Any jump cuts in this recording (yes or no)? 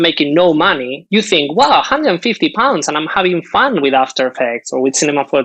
no